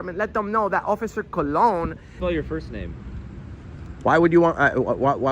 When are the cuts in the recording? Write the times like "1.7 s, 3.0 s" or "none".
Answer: 2.2 s

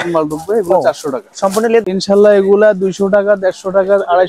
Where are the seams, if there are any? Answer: 1.8 s

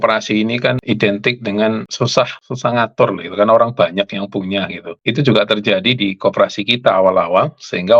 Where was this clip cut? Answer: 0.8 s, 2.1 s, 4.9 s

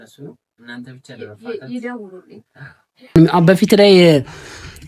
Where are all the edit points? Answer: 3.2 s

